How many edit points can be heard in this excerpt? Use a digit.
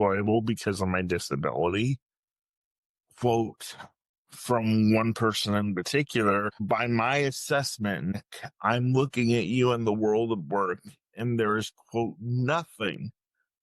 2